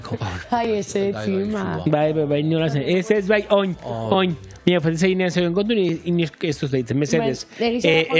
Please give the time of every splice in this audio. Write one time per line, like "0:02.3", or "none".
none